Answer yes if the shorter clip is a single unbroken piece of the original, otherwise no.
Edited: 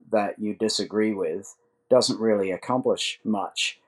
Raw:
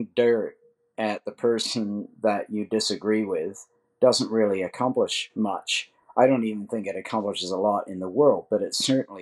yes